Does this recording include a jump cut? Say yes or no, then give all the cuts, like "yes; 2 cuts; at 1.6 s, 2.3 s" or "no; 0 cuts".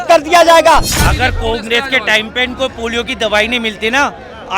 yes; 1 cut; at 0.9 s